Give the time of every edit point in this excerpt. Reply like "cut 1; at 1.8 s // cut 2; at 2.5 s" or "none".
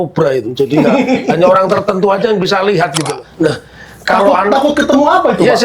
cut 1; at 3.2 s